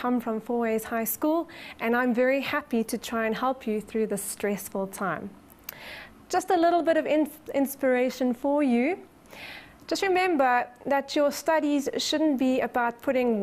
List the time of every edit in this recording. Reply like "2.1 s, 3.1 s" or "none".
none

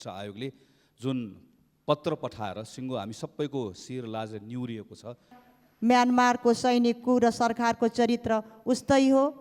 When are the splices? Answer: 5.4 s

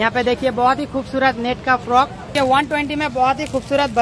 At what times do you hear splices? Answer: 2.3 s

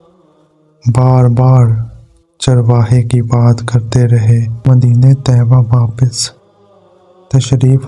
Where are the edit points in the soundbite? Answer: 4.6 s

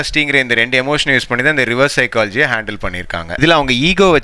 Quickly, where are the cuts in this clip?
3.2 s

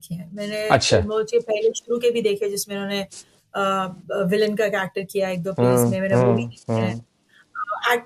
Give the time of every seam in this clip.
none

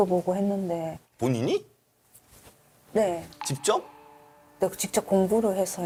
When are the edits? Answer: none

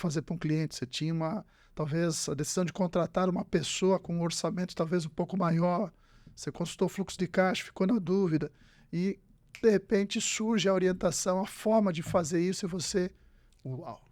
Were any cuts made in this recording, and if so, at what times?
none

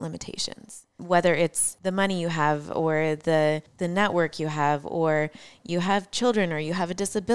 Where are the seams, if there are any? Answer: 0.9 s, 1.7 s, 3.7 s

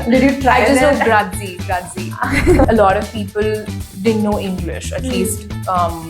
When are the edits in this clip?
2.7 s

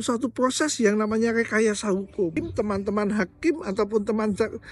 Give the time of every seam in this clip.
2.3 s

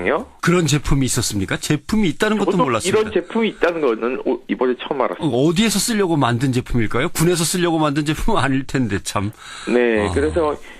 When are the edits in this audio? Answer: 1.2 s

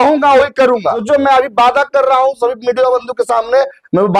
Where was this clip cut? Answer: 1.0 s

